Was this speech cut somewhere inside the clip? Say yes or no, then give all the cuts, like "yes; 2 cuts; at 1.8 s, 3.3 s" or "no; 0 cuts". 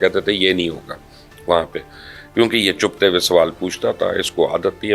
no; 0 cuts